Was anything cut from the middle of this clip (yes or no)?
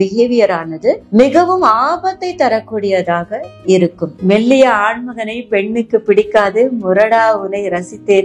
yes